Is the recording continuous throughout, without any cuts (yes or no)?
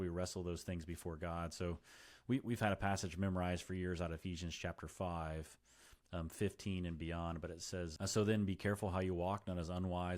no